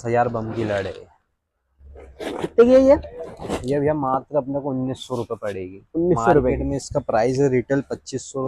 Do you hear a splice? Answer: no; 0 cuts

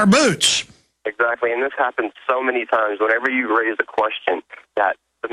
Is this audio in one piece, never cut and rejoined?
no; 1 cut; at 3.2 s

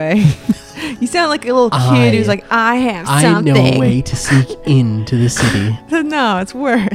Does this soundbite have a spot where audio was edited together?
yes; 1 cut; at 5.8 s

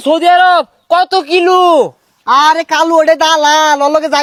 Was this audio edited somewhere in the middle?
no; 0 cuts

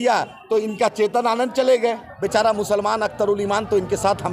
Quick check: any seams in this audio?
yes; 1 cut; at 2.1 s

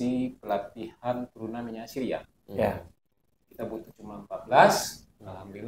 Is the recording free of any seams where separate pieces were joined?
yes; 0 cuts

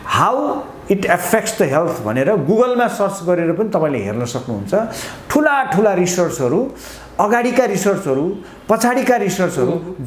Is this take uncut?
yes; 0 cuts

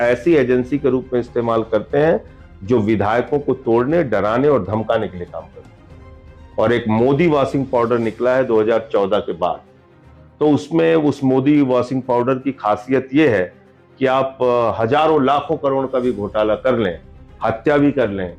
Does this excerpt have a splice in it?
no; 0 cuts

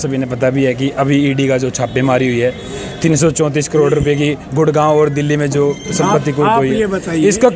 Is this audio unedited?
yes; 0 cuts

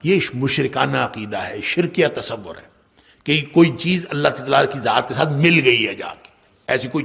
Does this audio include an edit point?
no; 0 cuts

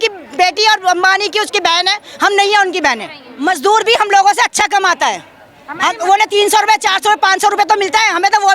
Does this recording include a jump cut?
yes; 1 cut; at 3.2 s

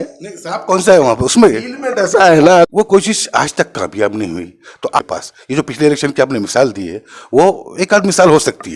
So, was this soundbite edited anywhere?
yes; 2 cuts; at 2.7 s, 5.0 s

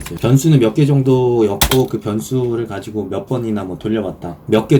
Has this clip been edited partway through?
no; 0 cuts

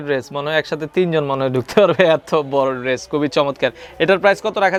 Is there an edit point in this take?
no; 0 cuts

